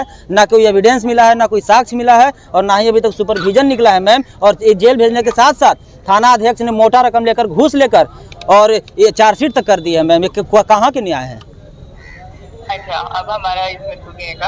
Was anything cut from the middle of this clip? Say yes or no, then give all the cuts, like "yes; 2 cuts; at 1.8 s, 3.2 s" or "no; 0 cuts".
no; 0 cuts